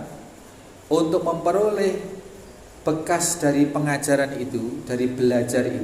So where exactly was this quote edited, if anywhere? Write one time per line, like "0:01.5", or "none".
none